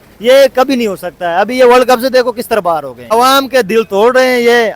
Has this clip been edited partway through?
yes; 1 cut; at 3.0 s

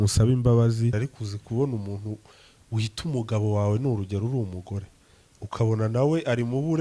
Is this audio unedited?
no; 1 cut; at 1.0 s

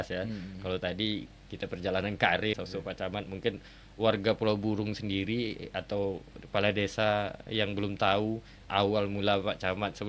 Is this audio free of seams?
no; 1 cut; at 2.5 s

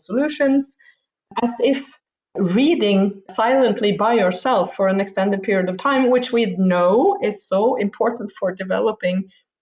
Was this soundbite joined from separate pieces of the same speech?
no; 0 cuts

